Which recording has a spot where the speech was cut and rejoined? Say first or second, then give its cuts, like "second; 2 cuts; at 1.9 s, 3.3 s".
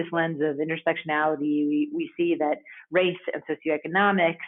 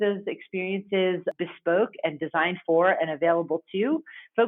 second; 1 cut; at 1.3 s